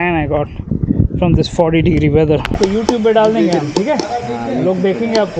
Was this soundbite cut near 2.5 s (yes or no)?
yes